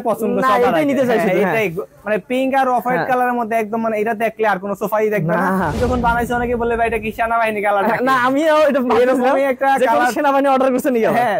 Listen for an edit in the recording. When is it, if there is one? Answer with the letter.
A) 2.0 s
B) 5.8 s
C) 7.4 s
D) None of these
B